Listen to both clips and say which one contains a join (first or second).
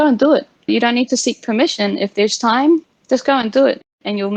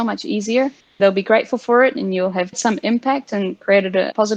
second